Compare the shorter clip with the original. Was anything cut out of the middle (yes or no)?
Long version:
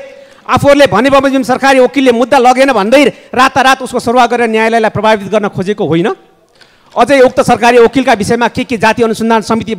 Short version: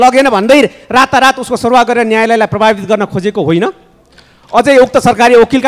no